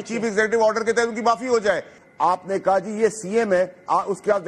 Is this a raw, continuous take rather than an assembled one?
no; 1 cut; at 1.9 s

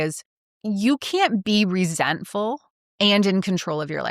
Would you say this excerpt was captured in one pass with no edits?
yes; 0 cuts

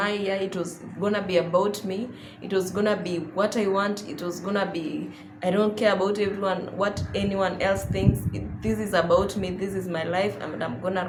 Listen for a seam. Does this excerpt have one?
no; 0 cuts

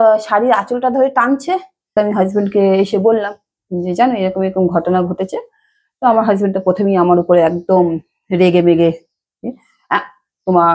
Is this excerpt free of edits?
no; 1 cut; at 1.9 s

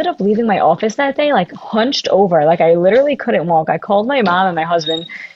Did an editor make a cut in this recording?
no; 0 cuts

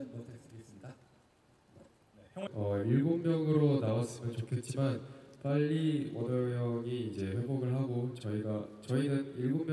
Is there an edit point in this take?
yes; 1 cut; at 2.4 s

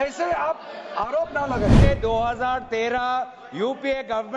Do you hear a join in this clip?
yes; 1 cut; at 1.8 s

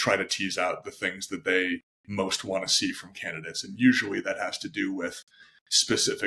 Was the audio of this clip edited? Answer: no; 0 cuts

